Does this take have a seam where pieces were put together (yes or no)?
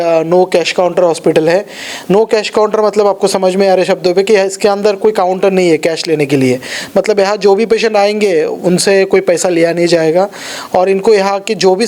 no